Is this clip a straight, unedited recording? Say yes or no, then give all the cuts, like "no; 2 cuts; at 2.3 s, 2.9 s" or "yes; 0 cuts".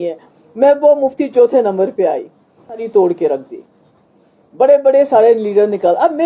no; 1 cut; at 2.9 s